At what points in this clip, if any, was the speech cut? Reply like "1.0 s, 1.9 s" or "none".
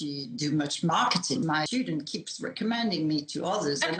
1.5 s